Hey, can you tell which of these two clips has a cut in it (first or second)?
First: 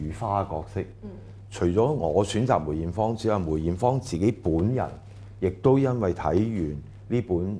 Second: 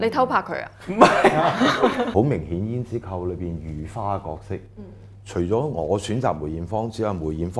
second